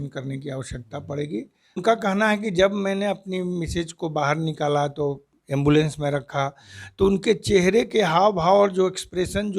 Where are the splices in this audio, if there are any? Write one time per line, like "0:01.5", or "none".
0:01.8